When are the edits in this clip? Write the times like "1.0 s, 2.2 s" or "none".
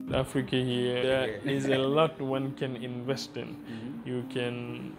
1.0 s